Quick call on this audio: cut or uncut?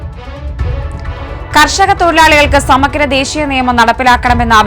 cut